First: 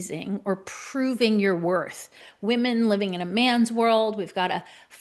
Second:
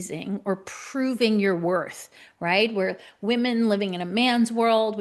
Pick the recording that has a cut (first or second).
first